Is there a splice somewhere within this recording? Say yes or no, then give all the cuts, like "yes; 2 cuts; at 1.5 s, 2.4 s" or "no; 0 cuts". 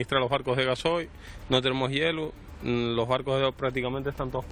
no; 0 cuts